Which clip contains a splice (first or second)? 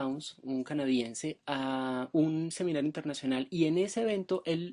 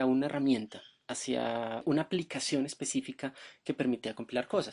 second